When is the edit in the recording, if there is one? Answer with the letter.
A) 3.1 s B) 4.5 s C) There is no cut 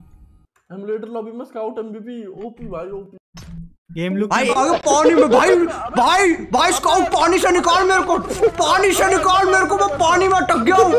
B